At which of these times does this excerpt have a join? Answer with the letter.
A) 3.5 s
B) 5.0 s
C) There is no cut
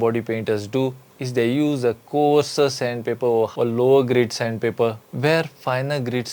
C